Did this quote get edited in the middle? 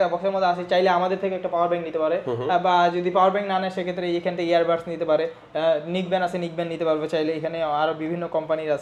no; 0 cuts

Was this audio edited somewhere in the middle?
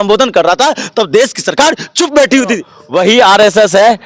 yes; 1 cut; at 2.7 s

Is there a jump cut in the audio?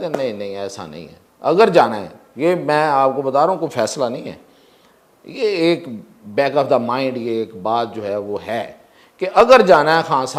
no; 0 cuts

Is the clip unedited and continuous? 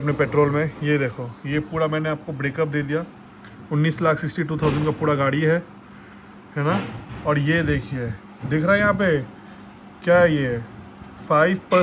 yes; 0 cuts

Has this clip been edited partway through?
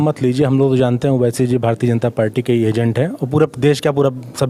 no; 0 cuts

